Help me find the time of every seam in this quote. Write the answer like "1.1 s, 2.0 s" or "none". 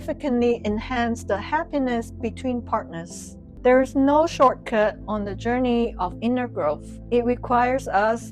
3.4 s